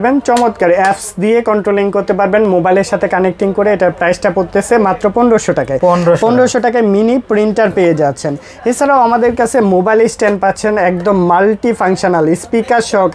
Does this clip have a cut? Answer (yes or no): no